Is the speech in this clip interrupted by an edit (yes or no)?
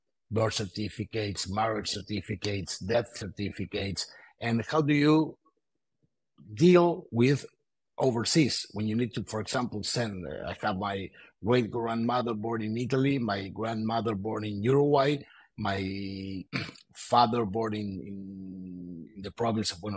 no